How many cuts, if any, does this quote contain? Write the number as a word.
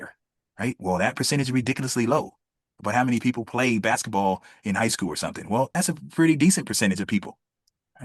zero